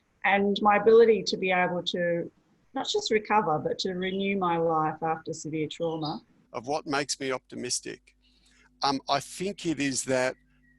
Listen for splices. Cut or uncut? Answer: cut